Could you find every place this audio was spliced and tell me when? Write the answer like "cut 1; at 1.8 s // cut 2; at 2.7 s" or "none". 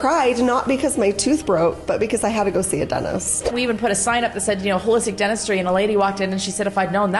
cut 1; at 3.5 s